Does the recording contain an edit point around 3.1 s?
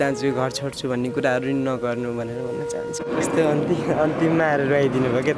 yes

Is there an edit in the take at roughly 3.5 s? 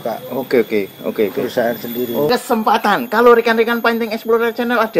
no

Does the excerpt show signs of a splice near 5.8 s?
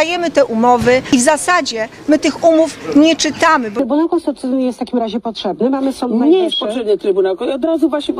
no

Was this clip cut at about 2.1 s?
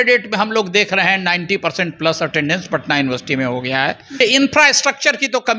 no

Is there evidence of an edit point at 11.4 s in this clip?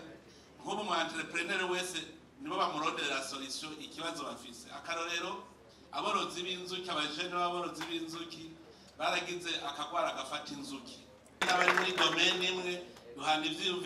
yes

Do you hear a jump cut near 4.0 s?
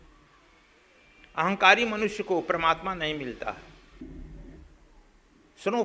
yes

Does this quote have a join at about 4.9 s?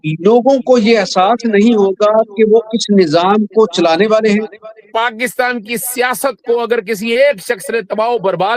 yes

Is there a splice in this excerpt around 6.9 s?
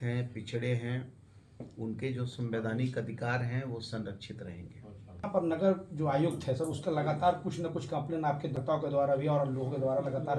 no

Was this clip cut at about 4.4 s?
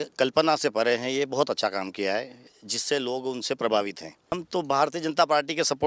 yes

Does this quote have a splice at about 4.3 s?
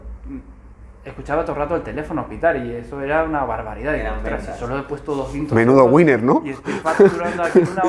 no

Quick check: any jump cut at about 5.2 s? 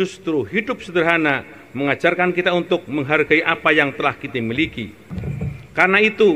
yes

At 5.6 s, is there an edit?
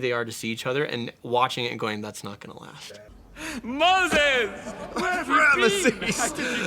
no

